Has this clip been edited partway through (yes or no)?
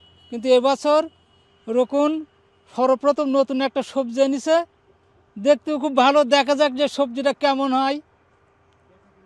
no